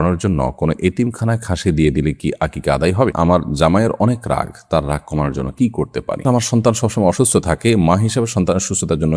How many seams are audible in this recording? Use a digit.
2